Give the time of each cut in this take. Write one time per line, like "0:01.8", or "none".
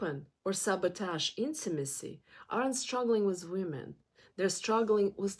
none